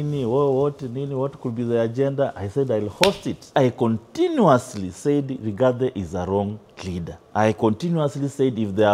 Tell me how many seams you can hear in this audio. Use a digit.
2